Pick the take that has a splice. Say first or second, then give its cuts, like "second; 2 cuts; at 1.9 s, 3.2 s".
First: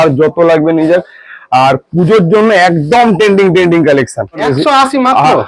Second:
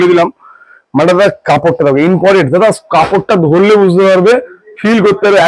first; 1 cut; at 4.4 s